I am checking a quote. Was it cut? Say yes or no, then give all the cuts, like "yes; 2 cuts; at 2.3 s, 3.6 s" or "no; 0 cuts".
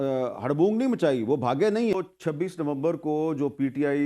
yes; 1 cut; at 2.1 s